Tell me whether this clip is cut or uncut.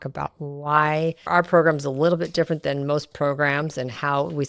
uncut